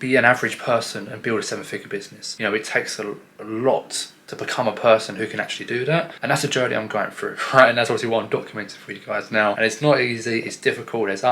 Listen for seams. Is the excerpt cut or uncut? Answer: cut